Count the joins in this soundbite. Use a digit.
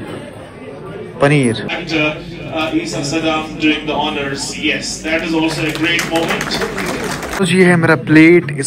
2